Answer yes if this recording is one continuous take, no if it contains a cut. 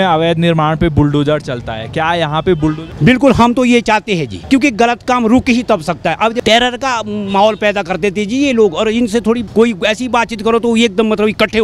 no